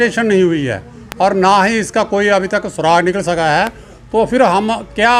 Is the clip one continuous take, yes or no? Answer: yes